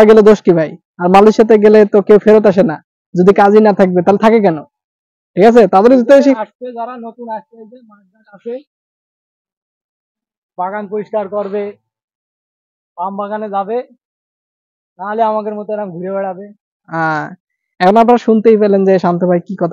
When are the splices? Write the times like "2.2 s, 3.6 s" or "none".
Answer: none